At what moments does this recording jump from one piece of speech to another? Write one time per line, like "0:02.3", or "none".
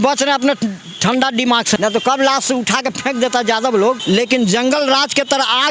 0:01.8
0:04.0